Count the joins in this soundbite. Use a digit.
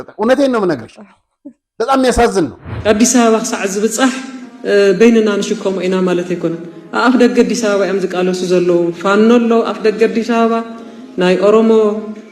2